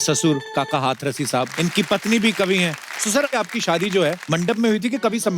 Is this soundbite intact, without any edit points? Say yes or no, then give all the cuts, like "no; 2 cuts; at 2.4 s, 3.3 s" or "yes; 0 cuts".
no; 3 cuts; at 1.5 s, 3.3 s, 4.2 s